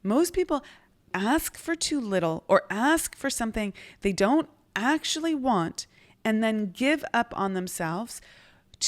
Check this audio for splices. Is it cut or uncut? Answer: cut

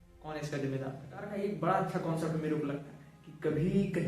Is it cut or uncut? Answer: cut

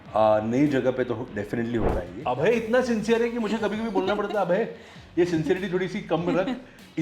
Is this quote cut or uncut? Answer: cut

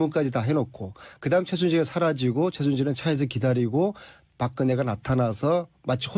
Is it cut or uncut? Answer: uncut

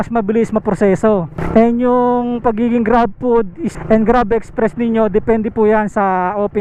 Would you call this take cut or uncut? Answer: uncut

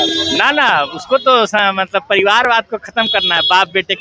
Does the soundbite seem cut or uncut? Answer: uncut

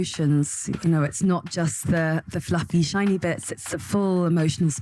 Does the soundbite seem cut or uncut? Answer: cut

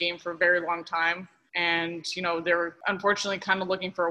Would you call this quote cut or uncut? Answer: cut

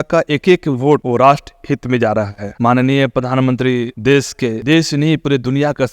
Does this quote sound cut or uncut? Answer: uncut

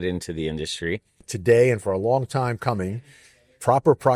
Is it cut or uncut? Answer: cut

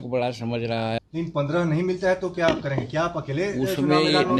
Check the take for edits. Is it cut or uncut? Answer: cut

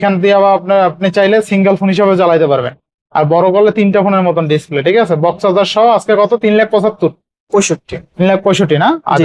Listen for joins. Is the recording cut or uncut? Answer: uncut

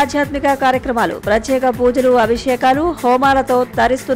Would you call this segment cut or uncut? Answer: uncut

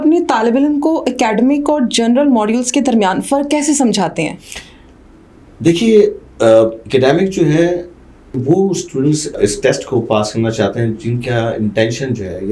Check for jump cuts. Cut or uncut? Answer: uncut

